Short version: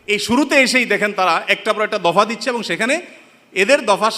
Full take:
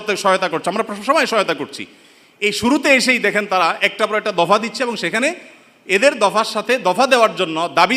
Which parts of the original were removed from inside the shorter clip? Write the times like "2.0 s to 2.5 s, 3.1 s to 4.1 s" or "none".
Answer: none